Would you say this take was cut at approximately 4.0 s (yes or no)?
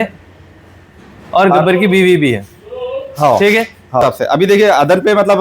yes